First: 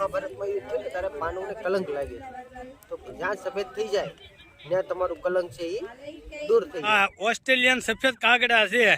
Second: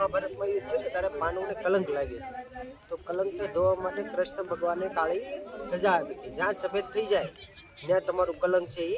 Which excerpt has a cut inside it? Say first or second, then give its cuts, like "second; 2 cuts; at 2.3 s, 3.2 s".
first; 2 cuts; at 3.0 s, 6.9 s